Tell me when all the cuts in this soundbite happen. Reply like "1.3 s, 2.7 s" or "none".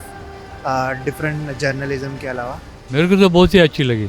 2.8 s